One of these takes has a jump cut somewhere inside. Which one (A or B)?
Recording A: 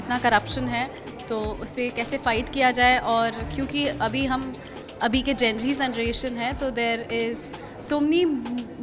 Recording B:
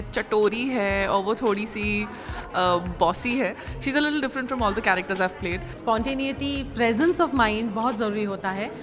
B